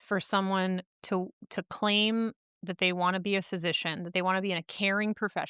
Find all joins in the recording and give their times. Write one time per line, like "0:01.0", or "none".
none